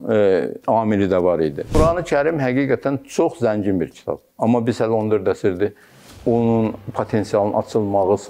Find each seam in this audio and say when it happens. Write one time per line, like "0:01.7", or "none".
0:01.7
0:04.2